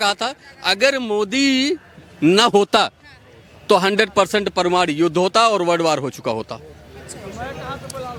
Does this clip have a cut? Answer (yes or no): no